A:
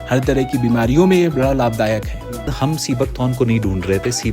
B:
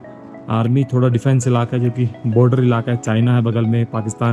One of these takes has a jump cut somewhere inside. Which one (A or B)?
A